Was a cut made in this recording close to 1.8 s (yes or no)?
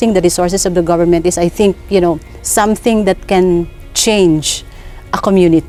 no